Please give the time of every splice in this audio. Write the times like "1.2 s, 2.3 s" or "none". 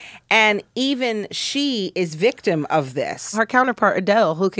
3.4 s

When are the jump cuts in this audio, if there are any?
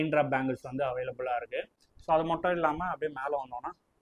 none

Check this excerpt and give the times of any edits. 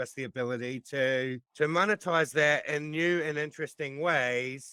none

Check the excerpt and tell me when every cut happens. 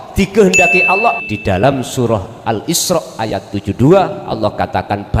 1.2 s

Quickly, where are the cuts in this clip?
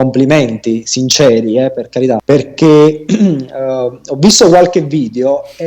2.2 s

